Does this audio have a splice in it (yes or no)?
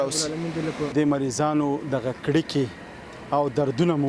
yes